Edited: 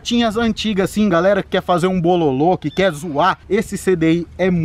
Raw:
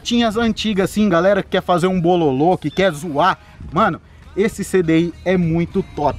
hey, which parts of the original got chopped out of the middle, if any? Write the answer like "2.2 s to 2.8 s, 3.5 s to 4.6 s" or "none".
3.4 s to 4.3 s